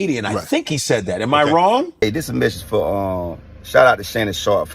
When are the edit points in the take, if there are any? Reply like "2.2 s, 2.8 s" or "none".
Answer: 2.0 s